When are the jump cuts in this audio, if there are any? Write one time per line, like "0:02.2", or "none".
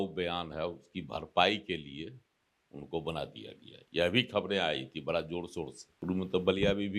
none